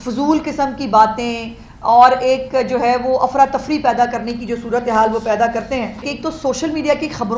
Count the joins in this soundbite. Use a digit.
1